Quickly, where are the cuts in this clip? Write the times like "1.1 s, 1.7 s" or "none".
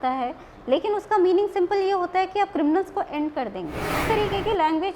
4.0 s

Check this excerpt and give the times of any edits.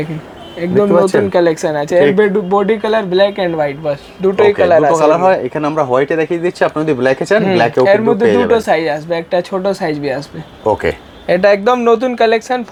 none

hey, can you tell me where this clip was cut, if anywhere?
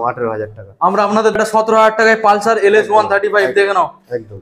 1.4 s

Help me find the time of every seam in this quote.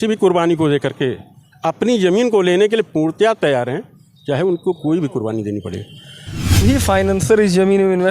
6.6 s

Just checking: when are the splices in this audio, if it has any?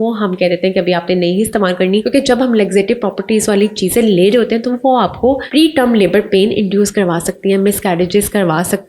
2.0 s, 5.4 s

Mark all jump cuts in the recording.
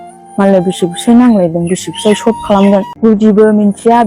2.9 s

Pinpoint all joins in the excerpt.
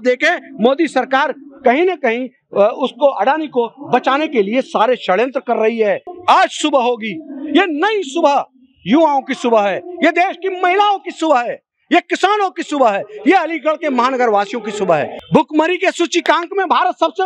6.1 s, 15.2 s

